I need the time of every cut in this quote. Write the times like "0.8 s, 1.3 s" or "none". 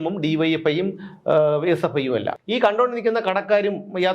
2.4 s